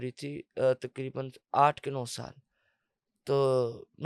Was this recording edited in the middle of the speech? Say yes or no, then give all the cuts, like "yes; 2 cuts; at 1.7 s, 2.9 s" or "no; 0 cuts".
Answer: no; 0 cuts